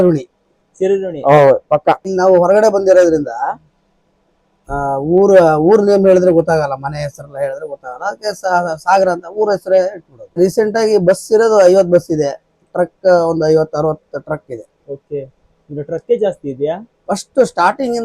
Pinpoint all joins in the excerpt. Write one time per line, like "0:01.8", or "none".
0:02.1
0:10.4